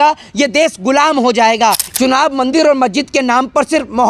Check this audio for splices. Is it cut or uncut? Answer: cut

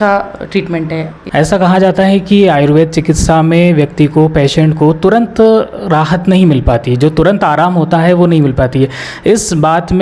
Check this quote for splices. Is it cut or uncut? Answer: cut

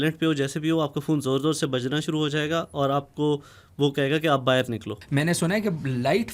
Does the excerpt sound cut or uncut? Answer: cut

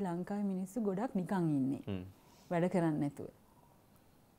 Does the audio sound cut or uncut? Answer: uncut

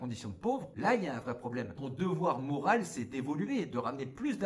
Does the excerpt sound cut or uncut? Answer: cut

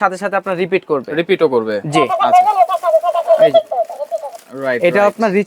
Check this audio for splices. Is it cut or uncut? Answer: uncut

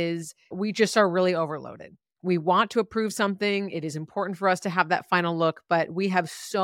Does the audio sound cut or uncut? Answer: uncut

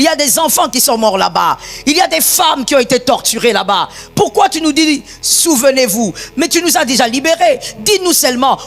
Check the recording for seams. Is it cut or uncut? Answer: uncut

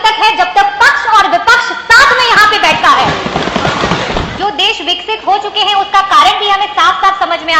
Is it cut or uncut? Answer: cut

